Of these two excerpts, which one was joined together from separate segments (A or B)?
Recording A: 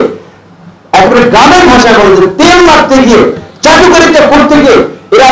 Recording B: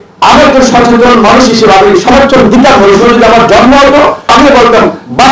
B